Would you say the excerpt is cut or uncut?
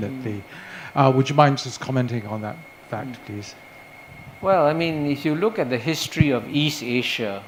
uncut